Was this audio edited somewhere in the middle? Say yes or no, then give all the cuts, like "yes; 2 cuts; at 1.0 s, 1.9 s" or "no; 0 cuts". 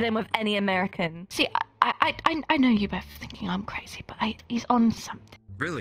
yes; 1 cut; at 1.2 s